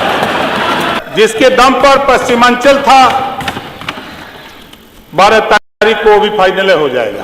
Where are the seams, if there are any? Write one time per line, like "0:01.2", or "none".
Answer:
0:01.0